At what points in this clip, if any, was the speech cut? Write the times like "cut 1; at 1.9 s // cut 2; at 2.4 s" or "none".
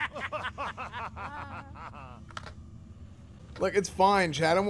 none